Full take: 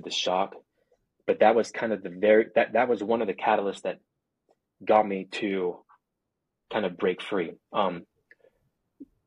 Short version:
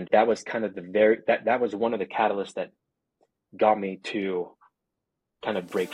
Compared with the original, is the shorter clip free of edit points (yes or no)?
yes